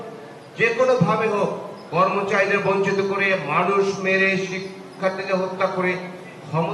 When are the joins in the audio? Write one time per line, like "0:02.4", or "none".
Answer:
none